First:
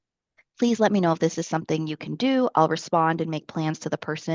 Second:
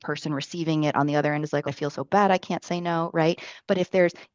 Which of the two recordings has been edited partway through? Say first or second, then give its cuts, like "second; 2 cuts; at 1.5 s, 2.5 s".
second; 1 cut; at 1.6 s